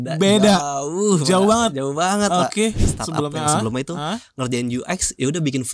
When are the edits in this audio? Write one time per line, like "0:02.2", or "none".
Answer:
0:02.9